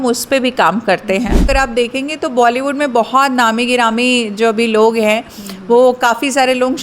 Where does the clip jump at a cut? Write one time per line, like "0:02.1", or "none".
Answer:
0:01.5